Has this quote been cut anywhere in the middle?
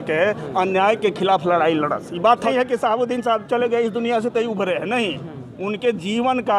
yes; 1 cut; at 2.5 s

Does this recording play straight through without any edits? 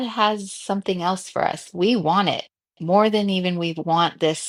yes; 0 cuts

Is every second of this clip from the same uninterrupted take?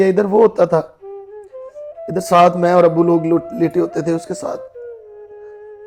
yes; 0 cuts

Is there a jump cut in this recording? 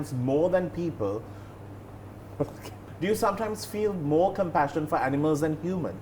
yes; 1 cut; at 2.9 s

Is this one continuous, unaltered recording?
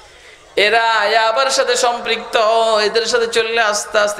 yes; 0 cuts

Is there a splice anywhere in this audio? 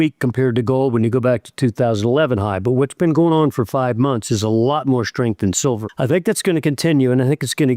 yes; 1 cut; at 5.9 s

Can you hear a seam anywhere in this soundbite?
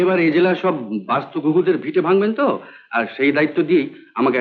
no; 0 cuts

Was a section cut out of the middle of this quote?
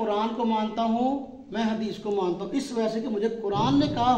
no; 0 cuts

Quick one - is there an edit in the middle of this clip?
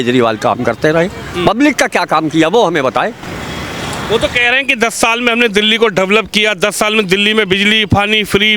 no; 0 cuts

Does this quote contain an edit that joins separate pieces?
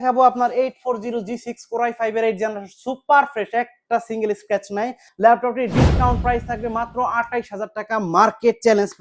yes; 1 cut; at 5.0 s

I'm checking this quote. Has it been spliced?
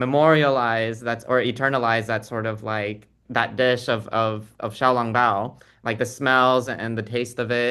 no; 0 cuts

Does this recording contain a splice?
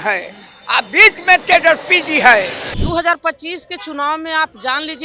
yes; 1 cut; at 2.7 s

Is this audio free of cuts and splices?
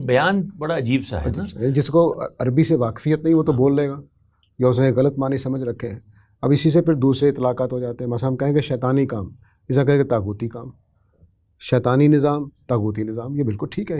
yes; 0 cuts

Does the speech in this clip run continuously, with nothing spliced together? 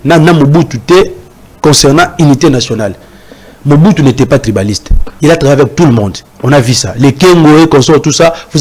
yes; 0 cuts

